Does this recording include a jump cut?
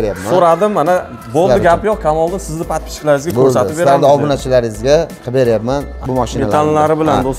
yes; 1 cut; at 5.9 s

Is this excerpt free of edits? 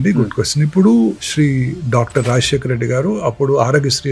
no; 1 cut; at 1.2 s

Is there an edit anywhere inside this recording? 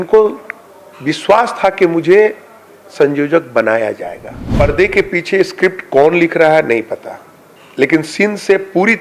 yes; 1 cut; at 4.4 s

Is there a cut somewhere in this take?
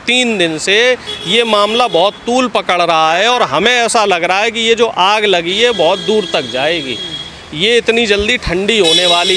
no; 0 cuts

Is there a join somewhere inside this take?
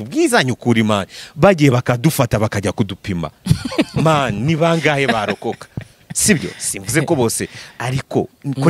no; 0 cuts

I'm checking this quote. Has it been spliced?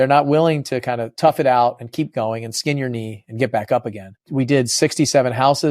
yes; 2 cuts; at 1.1 s, 4.2 s

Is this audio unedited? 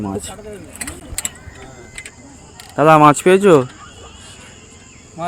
yes; 0 cuts

